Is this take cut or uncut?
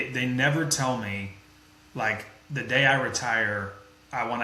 uncut